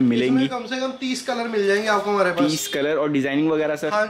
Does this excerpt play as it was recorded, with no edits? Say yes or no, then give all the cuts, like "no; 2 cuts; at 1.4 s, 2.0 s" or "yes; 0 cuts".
yes; 0 cuts